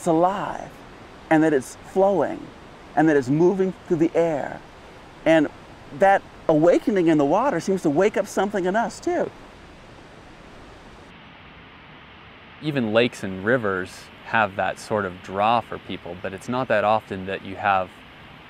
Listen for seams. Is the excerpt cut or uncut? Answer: cut